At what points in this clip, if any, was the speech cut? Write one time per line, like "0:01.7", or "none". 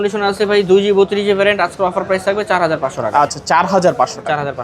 none